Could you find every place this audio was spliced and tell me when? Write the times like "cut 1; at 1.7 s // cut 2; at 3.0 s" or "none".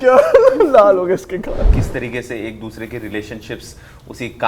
cut 1; at 1.7 s